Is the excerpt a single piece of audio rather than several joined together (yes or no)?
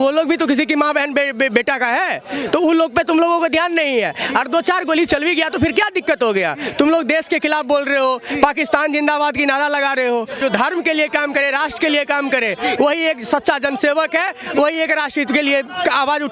no